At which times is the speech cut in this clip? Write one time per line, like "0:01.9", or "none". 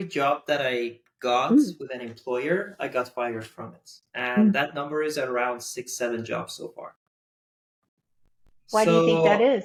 none